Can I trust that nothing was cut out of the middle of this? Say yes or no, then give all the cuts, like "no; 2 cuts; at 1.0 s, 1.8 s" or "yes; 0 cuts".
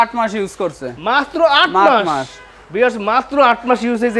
yes; 0 cuts